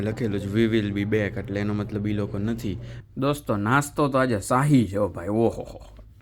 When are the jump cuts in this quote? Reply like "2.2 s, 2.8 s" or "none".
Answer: 2.9 s